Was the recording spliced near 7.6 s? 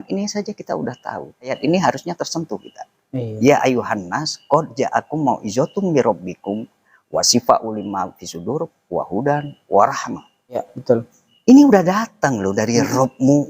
no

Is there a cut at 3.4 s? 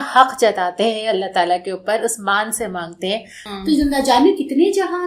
yes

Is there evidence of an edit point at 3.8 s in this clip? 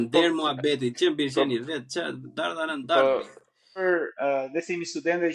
yes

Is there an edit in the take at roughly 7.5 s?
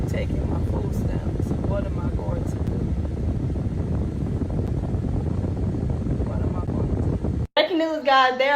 yes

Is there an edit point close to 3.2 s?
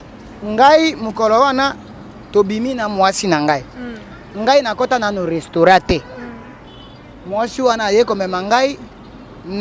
no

